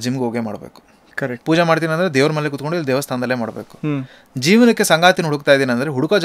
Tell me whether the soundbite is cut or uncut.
uncut